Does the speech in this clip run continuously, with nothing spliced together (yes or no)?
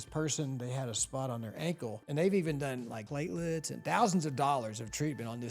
no